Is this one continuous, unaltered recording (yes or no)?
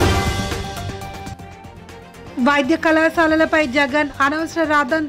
yes